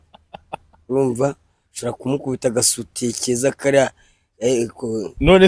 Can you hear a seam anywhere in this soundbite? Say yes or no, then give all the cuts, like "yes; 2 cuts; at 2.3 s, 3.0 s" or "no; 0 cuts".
no; 0 cuts